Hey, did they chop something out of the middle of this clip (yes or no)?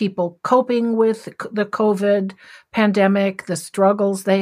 no